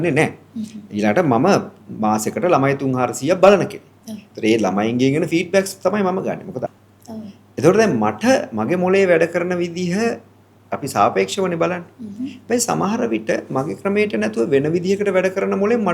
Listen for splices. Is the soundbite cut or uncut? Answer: cut